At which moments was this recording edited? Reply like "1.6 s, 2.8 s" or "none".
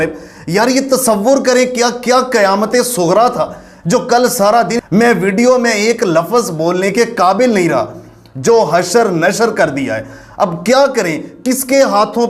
none